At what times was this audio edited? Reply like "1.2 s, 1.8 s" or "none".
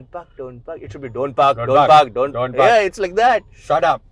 none

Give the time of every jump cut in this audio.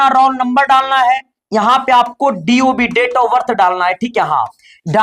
none

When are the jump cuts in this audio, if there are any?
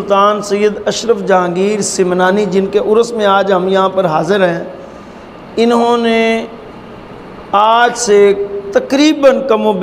none

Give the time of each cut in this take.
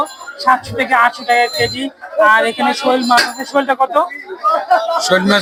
none

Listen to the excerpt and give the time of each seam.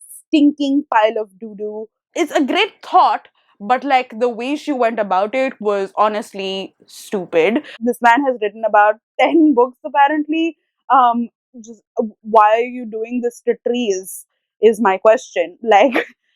2.0 s, 7.7 s

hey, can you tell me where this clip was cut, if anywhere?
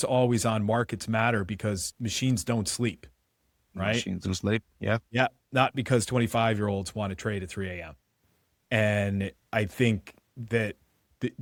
none

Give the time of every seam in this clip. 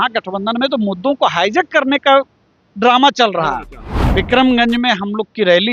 3.9 s

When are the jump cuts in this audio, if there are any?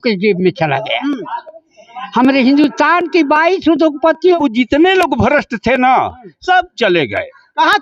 4.4 s

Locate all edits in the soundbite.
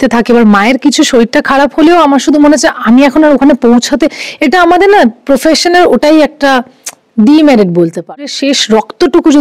8.4 s

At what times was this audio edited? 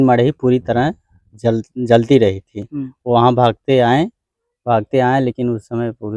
none

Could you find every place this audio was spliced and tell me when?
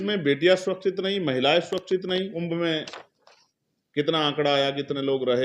2.3 s

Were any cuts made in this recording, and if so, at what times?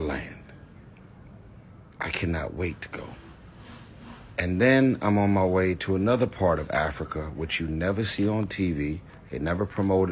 none

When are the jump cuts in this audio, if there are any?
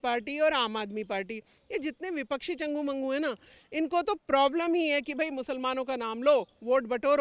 none

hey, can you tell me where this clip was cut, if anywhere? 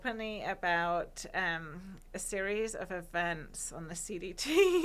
none

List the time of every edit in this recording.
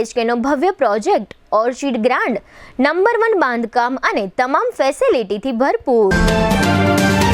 6.1 s

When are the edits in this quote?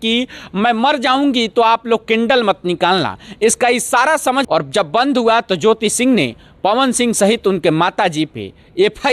4.5 s

